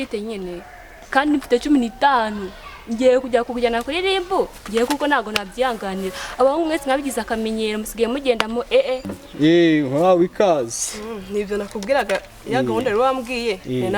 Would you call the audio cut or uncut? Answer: cut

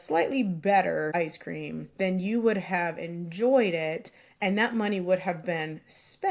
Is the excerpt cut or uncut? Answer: cut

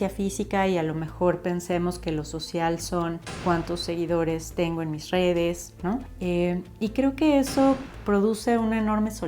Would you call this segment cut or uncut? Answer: uncut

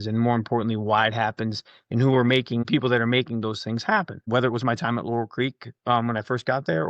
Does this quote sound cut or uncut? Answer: cut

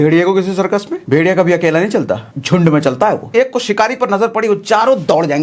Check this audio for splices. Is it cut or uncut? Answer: cut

